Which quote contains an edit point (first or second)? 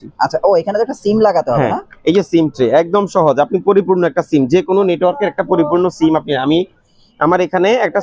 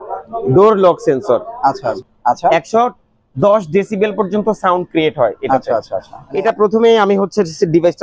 second